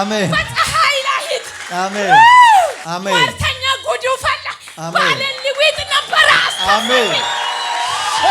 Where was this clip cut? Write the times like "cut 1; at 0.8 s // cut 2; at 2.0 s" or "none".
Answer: cut 1; at 2.8 s

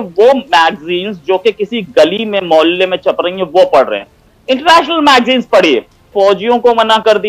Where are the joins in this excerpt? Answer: cut 1; at 6.1 s

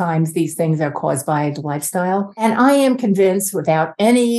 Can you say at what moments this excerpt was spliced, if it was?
cut 1; at 2.4 s

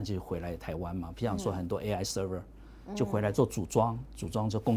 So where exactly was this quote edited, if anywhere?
none

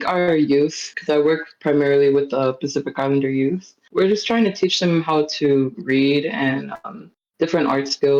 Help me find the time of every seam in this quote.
cut 1; at 0.9 s // cut 2; at 3.9 s

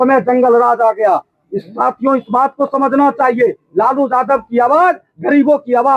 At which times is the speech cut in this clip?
none

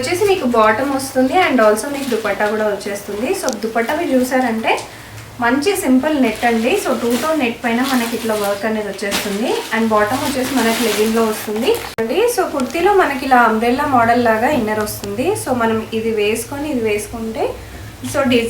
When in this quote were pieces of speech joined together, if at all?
cut 1; at 11.9 s

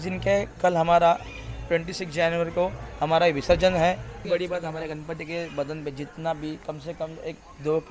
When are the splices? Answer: cut 1; at 4.1 s

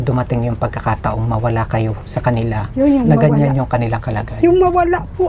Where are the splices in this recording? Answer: none

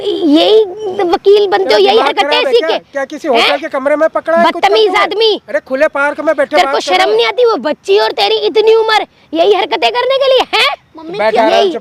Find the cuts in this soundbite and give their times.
none

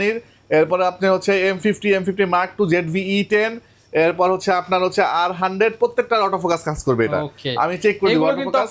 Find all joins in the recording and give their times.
none

